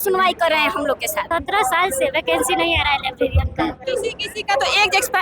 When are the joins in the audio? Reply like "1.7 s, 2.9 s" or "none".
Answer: 1.2 s, 3.8 s